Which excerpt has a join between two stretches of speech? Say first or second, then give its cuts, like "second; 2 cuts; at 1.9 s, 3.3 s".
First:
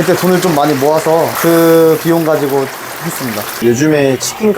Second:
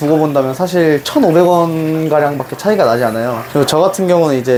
first; 1 cut; at 3.5 s